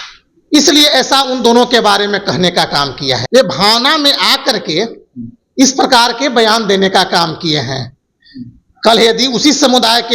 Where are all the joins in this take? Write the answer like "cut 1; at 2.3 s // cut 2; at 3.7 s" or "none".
cut 1; at 3.2 s